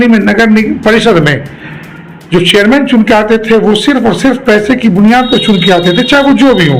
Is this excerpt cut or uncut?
uncut